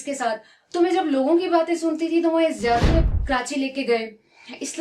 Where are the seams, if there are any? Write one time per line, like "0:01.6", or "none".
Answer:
0:02.9